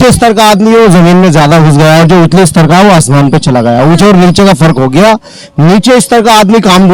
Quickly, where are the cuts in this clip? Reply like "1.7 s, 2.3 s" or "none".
none

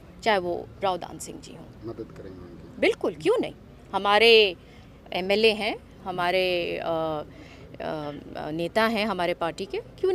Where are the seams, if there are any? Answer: none

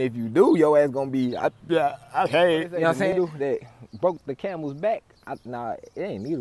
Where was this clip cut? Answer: 3.1 s

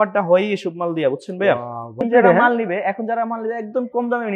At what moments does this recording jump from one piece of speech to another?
2.0 s

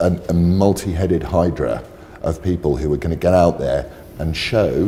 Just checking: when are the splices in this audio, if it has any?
none

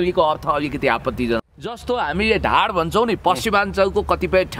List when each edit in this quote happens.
1.4 s

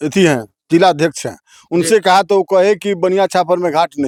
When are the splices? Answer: none

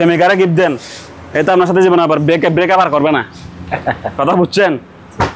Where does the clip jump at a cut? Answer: none

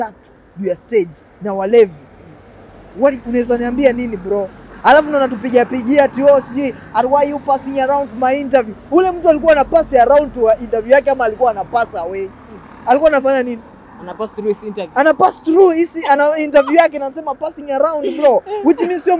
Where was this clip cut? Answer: none

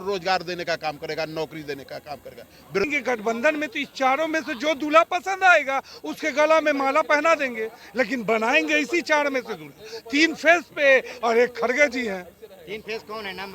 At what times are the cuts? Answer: 2.8 s

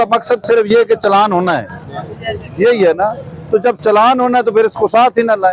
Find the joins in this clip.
none

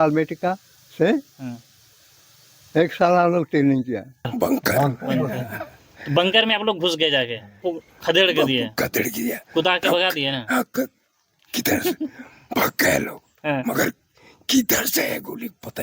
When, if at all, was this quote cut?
4.3 s, 7.6 s

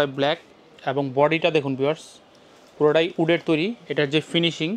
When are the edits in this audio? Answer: none

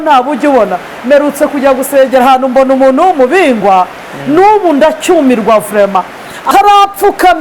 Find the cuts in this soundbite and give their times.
6.4 s

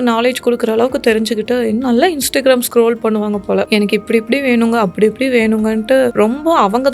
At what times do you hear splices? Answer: 3.7 s

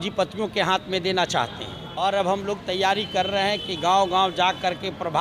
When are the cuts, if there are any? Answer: 1.9 s

